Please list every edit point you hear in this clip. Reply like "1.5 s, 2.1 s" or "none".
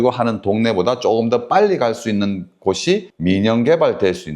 none